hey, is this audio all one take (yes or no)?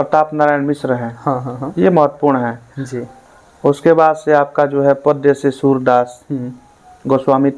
yes